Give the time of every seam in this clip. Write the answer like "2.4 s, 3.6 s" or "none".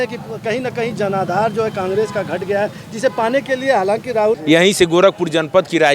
4.4 s